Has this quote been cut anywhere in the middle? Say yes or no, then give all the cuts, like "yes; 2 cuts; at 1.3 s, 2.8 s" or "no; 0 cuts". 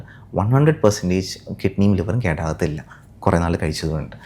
no; 0 cuts